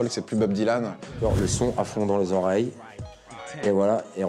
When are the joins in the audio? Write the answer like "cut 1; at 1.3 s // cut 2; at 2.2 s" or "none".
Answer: cut 1; at 1.1 s